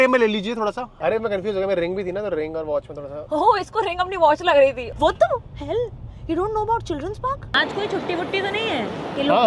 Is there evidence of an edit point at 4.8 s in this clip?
yes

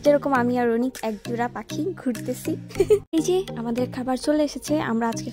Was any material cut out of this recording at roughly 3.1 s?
yes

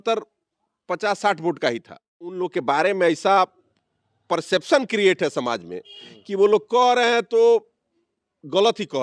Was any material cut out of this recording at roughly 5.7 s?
no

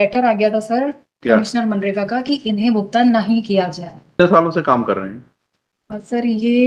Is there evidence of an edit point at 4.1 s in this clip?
yes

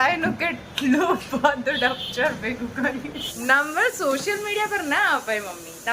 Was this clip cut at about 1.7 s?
no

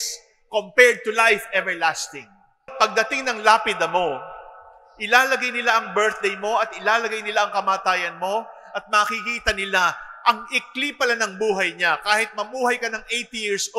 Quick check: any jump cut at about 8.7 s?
no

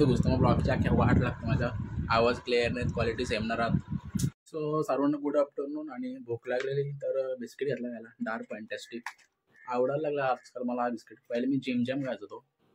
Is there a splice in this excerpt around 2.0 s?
no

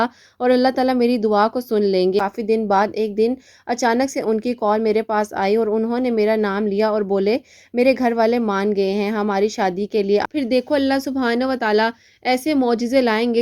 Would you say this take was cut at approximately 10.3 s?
yes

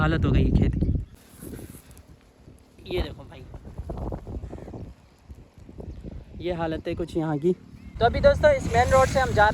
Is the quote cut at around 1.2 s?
yes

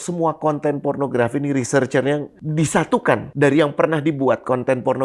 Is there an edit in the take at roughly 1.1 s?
no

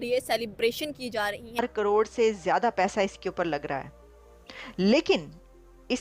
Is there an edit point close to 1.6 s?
yes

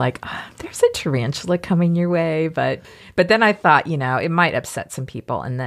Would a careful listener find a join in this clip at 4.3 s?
no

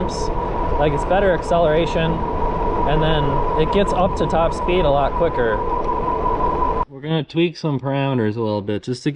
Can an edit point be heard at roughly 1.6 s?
no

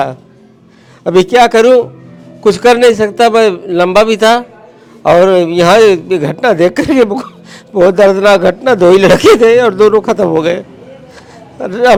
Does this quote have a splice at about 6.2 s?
no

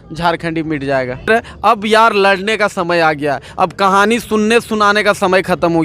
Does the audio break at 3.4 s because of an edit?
no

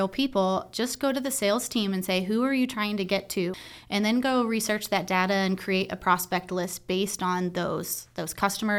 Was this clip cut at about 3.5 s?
yes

